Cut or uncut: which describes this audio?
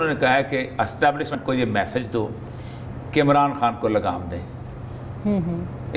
cut